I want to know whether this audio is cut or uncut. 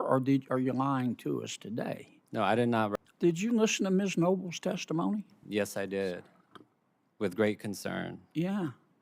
cut